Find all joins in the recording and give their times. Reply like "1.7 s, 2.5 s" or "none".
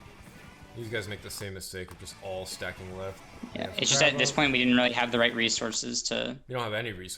3.3 s